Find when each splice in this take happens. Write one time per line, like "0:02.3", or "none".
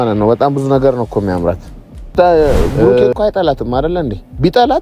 0:02.1